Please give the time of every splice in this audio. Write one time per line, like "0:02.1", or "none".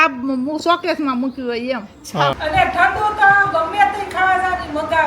0:02.4

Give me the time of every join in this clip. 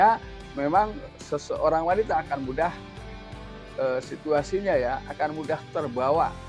0:01.1

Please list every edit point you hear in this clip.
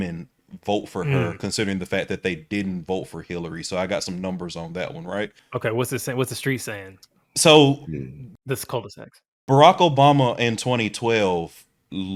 none

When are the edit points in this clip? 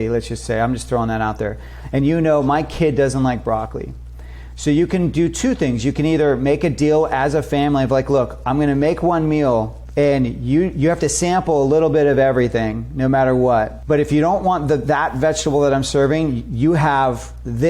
0:09.8
0:13.8

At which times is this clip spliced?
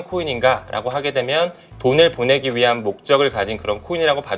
0:01.6

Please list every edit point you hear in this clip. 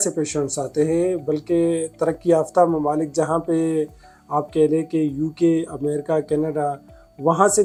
none

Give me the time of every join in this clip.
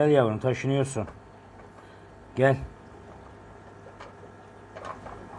none

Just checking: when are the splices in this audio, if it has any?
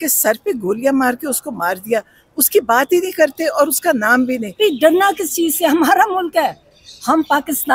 0:04.5

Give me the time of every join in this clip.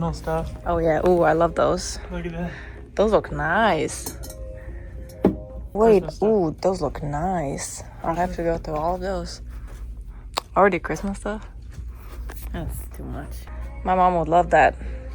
0:05.7
0:13.5

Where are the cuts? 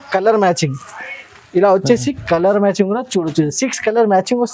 none

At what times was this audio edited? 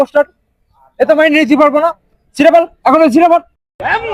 none

